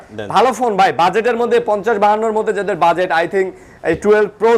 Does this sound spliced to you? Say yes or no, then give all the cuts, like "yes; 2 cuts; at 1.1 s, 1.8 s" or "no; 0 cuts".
no; 0 cuts